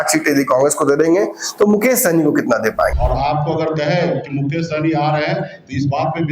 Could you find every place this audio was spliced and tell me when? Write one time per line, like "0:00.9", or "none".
0:02.9